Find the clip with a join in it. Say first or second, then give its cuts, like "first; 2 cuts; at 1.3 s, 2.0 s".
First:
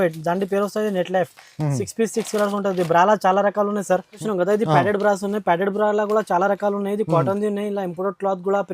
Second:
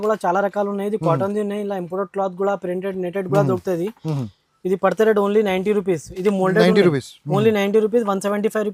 first; 1 cut; at 4.1 s